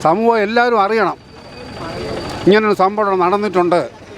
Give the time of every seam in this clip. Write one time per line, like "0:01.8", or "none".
none